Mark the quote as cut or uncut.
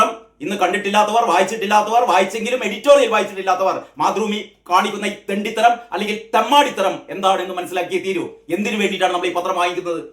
uncut